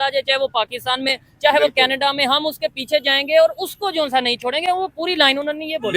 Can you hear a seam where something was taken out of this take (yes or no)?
no